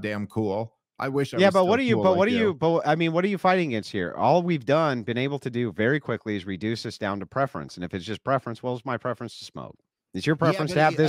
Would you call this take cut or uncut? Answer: uncut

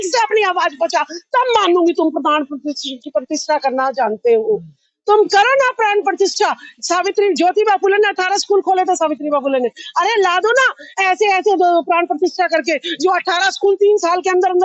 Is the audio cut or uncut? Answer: uncut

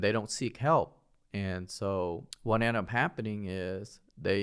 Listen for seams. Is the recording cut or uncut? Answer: cut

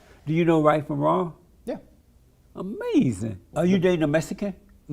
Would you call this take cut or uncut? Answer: cut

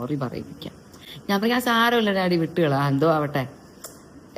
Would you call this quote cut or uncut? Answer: uncut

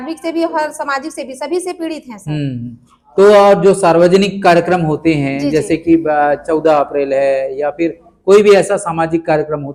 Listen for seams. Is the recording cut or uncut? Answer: uncut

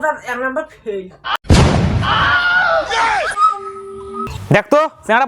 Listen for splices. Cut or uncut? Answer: cut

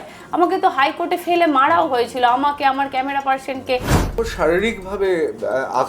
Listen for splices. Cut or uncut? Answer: cut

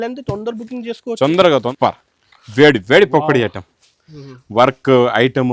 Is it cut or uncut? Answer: cut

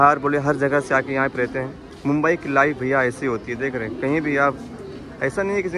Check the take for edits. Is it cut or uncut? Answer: uncut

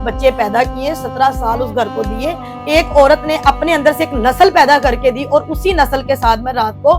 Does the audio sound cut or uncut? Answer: cut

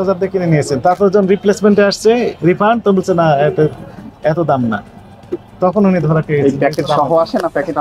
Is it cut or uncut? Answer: uncut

